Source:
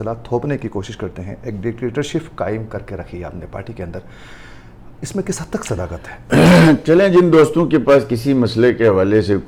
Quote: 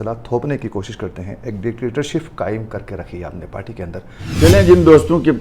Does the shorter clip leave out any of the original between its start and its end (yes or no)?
yes